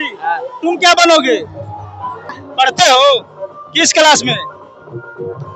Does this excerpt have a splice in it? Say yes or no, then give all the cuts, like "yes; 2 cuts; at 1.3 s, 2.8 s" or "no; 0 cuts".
yes; 1 cut; at 2.3 s